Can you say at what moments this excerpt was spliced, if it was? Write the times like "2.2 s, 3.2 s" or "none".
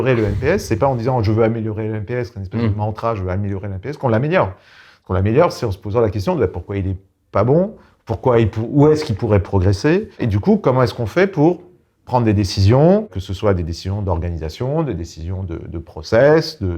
10.2 s